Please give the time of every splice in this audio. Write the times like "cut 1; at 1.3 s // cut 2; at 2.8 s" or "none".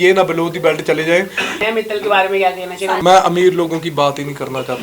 cut 1; at 1.6 s // cut 2; at 3.0 s